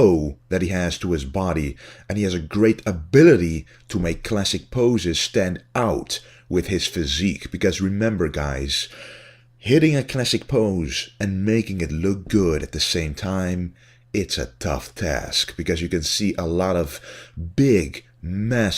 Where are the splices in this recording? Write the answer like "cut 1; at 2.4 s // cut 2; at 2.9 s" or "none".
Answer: cut 1; at 4.4 s